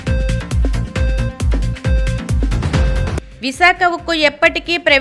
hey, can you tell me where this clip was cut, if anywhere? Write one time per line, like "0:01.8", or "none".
0:01.0

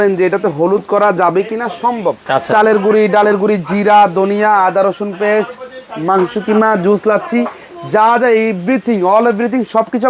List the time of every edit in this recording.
0:02.2

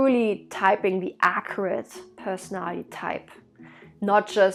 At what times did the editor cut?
none

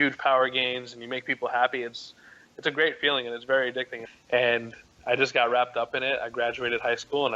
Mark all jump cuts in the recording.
0:04.0

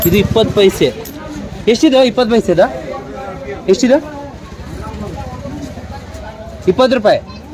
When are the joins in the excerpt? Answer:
none

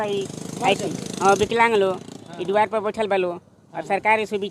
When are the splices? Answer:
none

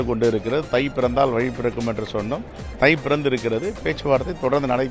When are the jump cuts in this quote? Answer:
none

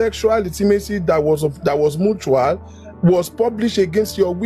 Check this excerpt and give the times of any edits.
none

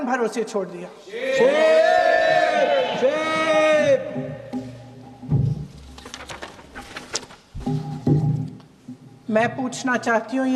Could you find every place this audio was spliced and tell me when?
none

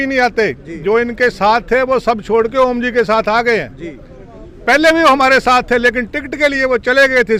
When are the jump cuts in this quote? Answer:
none

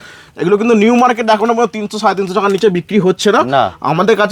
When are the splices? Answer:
none

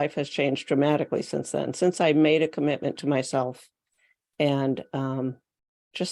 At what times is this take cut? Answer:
none

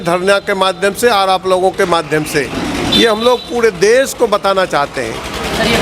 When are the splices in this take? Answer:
none

